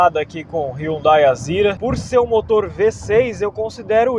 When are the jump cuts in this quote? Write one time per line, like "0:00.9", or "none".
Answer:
0:01.8